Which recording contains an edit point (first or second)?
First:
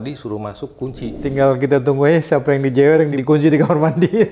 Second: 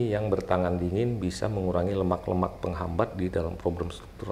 first